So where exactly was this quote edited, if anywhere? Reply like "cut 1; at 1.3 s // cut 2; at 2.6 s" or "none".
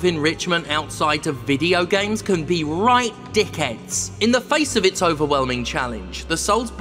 cut 1; at 4.0 s